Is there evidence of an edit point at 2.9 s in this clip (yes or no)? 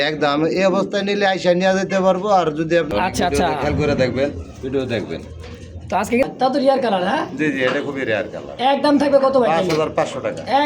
yes